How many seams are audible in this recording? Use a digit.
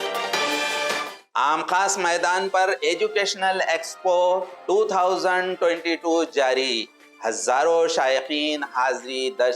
1